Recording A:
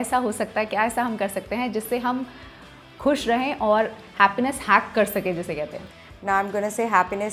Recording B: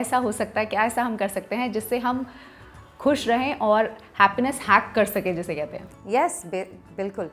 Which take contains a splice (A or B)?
A